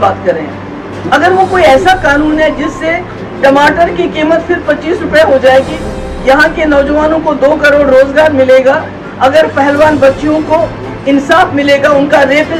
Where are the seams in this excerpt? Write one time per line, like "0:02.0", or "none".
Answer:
none